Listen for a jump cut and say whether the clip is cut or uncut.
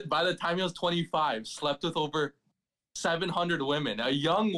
uncut